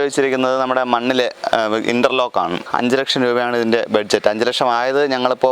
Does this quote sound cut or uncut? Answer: cut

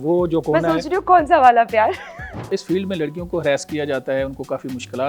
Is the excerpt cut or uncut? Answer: cut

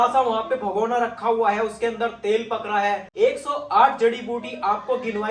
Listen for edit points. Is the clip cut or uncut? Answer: uncut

